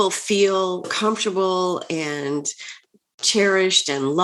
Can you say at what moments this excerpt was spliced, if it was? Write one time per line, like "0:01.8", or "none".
0:00.9

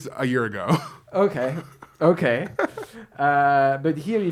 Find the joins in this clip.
none

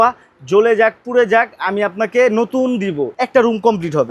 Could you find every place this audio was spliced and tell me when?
0:03.1

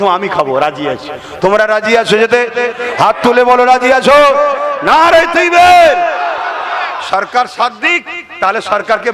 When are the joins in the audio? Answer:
none

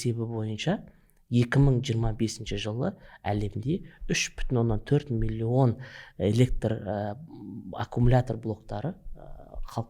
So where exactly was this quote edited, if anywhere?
none

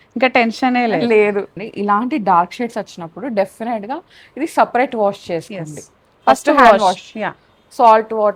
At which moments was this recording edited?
0:01.5

